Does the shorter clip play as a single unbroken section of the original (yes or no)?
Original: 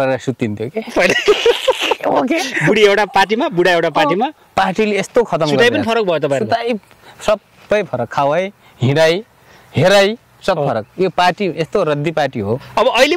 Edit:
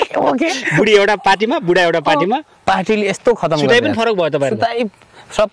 yes